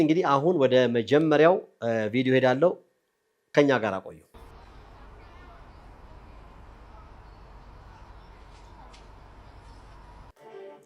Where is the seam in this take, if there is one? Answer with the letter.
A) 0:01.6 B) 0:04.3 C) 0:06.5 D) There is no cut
B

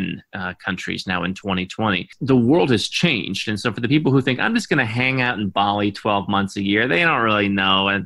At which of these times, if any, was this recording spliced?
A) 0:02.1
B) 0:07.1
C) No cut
A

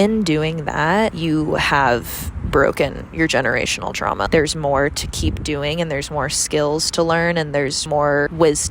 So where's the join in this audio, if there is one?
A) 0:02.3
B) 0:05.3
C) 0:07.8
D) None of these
C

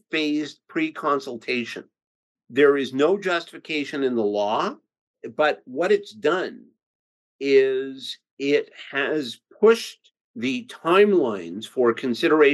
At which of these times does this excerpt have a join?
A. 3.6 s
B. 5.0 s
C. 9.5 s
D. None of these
B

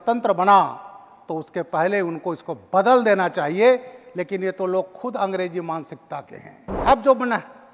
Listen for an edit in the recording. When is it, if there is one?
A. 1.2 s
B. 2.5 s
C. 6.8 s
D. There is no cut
C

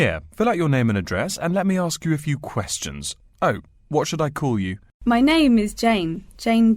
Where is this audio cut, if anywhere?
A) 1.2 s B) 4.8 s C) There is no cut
B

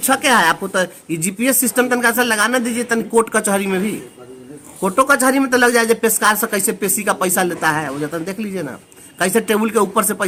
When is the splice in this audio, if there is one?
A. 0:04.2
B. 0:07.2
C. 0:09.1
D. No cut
D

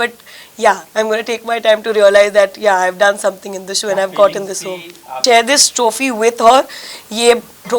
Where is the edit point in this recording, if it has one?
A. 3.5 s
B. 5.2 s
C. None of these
B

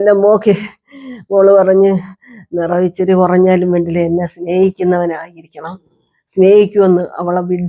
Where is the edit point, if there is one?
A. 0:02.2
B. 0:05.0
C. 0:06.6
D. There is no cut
D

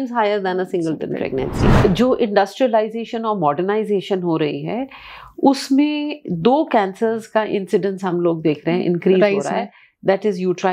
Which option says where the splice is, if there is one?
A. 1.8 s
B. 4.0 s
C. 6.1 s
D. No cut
A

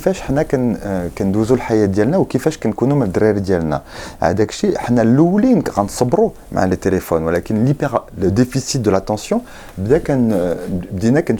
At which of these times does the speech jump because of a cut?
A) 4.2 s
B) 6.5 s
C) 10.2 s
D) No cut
D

